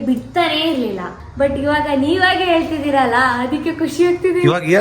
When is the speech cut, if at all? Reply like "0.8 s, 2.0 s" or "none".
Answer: 1.2 s